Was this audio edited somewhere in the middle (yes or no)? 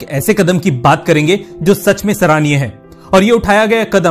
no